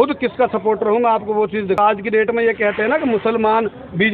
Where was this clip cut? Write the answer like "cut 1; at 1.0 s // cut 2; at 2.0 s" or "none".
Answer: cut 1; at 1.8 s